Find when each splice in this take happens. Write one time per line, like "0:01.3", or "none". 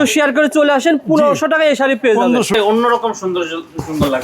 0:02.5

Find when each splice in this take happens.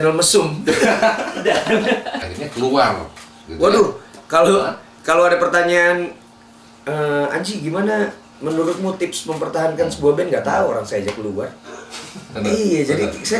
0:02.2
0:12.3

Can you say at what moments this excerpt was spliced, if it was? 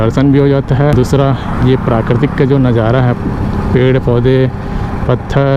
none

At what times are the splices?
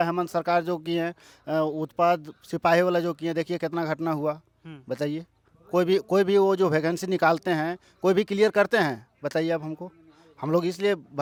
none

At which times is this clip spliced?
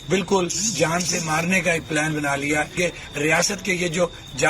0:02.7

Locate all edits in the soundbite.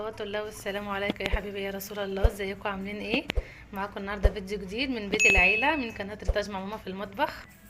none

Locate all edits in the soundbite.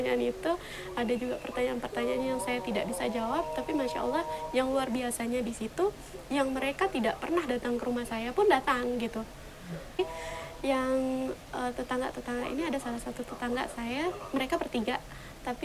0:10.0

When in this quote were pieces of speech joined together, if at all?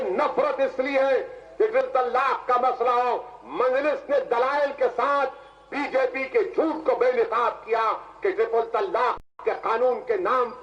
none

